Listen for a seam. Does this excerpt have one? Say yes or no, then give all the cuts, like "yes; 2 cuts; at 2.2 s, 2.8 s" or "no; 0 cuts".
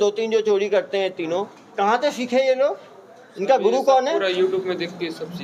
no; 0 cuts